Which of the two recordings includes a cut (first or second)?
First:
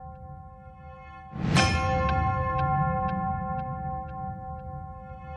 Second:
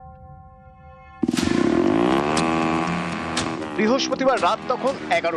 first